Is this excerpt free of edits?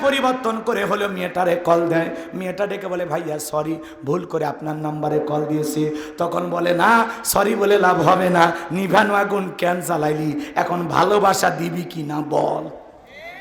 yes; 0 cuts

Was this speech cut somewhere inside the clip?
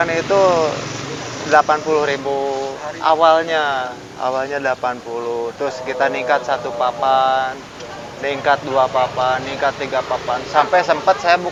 no; 0 cuts

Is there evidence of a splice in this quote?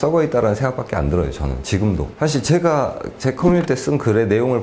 no; 0 cuts

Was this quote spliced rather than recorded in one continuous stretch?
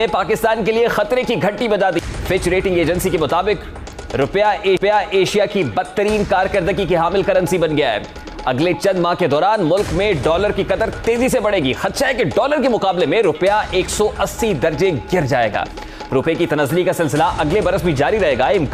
no; 0 cuts

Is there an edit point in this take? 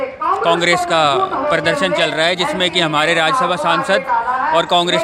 no; 0 cuts

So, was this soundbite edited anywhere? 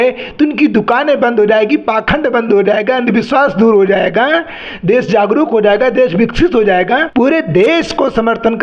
yes; 1 cut; at 7.1 s

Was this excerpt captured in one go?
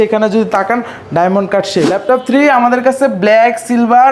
no; 1 cut; at 2.0 s

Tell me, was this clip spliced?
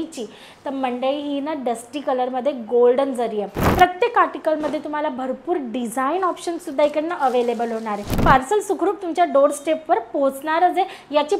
yes; 2 cuts; at 3.6 s, 8.1 s

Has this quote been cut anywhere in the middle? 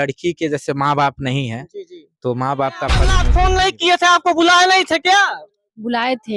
yes; 1 cut; at 3.2 s

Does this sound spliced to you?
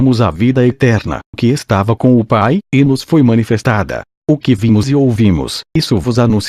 yes; 1 cut; at 1.3 s

